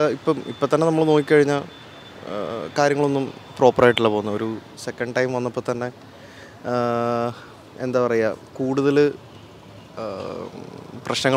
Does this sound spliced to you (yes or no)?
no